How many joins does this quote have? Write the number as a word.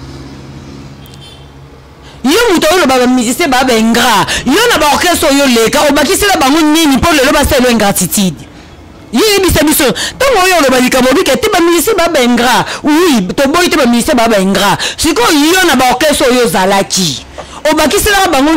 zero